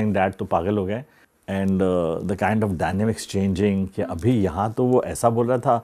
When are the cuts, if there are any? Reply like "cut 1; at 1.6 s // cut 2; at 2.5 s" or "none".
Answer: cut 1; at 1.1 s

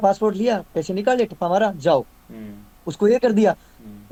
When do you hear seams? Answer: none

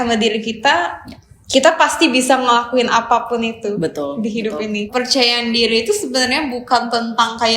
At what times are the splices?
cut 1; at 4.9 s

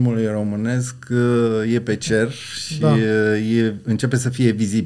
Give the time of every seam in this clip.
none

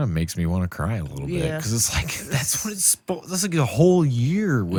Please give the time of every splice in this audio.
none

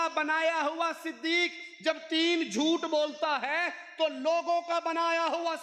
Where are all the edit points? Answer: none

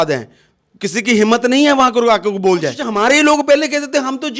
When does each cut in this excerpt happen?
cut 1; at 2.8 s

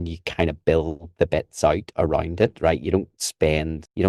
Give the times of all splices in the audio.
none

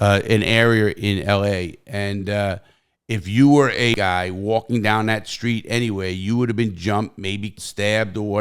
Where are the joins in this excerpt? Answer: cut 1; at 3.9 s // cut 2; at 7.6 s

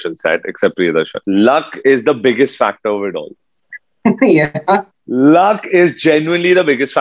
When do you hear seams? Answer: cut 1; at 1.2 s

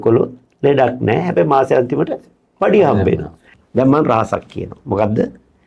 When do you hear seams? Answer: cut 1; at 3.5 s

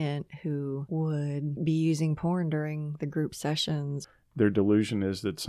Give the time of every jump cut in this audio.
cut 1; at 1.0 s // cut 2; at 4.0 s

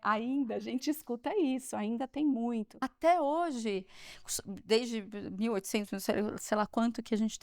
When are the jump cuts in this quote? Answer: cut 1; at 2.9 s

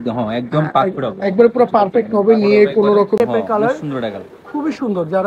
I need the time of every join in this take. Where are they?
cut 1; at 3.2 s

